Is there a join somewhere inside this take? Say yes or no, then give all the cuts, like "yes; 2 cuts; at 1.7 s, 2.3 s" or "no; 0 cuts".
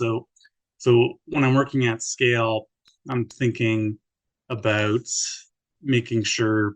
yes; 1 cut; at 5.7 s